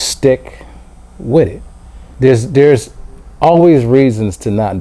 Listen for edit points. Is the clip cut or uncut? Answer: cut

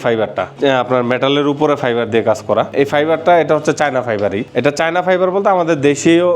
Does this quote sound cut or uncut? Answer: cut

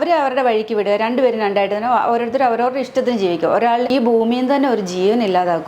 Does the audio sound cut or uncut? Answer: cut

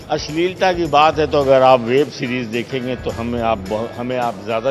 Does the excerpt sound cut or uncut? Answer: uncut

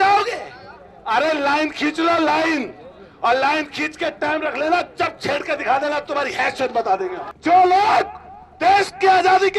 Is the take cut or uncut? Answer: cut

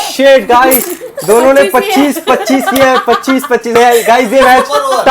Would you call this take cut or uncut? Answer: cut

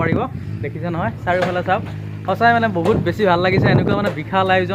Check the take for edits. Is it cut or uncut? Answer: uncut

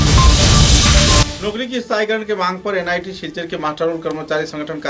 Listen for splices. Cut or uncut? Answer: uncut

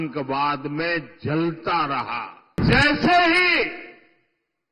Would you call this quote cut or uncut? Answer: cut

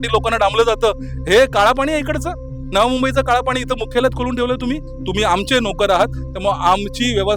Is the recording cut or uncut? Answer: cut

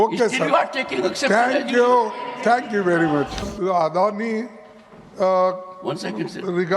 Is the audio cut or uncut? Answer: cut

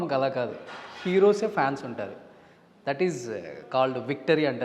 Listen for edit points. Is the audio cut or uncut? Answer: uncut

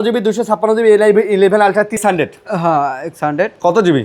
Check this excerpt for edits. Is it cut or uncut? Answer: cut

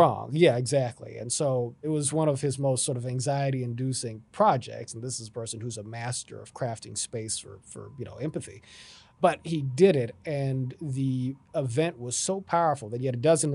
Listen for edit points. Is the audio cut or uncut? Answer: cut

